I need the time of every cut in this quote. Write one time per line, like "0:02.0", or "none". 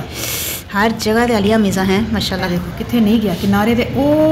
none